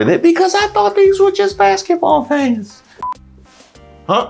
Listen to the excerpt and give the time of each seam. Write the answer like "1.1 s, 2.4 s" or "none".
3.1 s